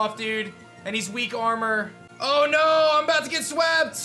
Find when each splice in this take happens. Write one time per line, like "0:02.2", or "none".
0:02.0